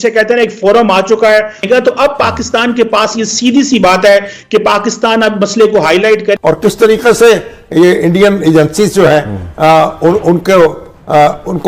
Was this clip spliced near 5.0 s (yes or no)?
no